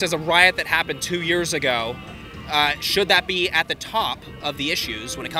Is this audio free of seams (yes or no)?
yes